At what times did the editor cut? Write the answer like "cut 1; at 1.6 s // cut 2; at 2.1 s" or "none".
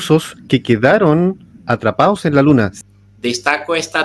cut 1; at 2.7 s